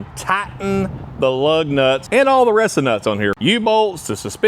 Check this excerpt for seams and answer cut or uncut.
cut